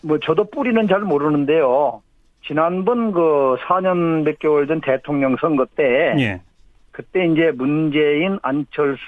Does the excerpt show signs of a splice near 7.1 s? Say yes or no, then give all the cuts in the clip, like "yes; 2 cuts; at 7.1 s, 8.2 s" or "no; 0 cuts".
yes; 1 cut; at 7.1 s